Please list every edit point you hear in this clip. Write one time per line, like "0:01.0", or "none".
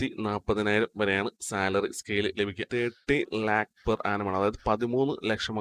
0:02.7